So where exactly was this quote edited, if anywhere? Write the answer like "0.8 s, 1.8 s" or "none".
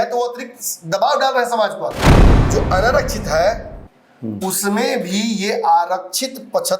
2.1 s

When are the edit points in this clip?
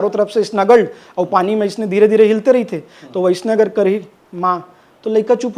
none

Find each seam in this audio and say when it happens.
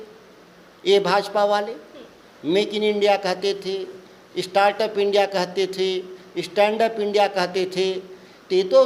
none

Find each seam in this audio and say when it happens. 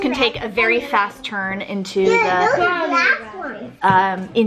none

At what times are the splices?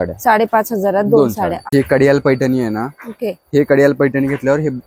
1.6 s

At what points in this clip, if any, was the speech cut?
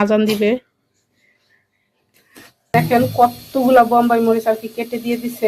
2.7 s

